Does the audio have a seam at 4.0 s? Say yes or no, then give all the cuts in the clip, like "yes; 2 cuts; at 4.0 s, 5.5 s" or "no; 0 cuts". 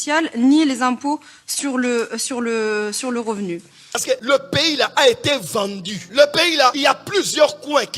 yes; 1 cut; at 4.0 s